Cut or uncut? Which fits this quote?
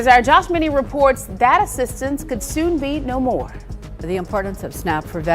cut